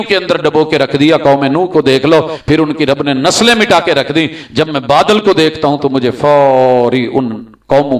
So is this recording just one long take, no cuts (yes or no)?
yes